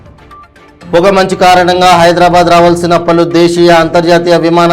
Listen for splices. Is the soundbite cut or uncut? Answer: cut